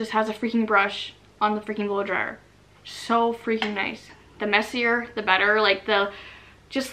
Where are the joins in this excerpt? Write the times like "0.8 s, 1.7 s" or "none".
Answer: 4.1 s

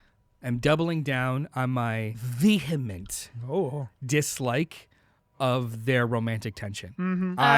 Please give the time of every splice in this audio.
2.2 s

